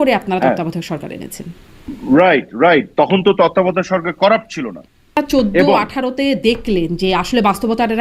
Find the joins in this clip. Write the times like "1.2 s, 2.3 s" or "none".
5.2 s